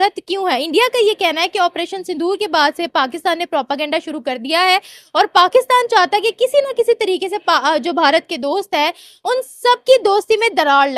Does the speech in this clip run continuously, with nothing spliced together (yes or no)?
yes